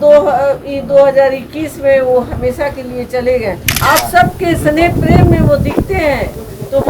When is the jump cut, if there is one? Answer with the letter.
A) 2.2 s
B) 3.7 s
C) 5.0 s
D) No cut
B